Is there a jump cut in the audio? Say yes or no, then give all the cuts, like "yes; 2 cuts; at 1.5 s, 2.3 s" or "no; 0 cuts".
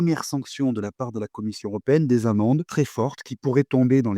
yes; 1 cut; at 2.7 s